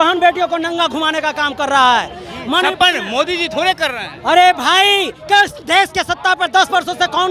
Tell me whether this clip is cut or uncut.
uncut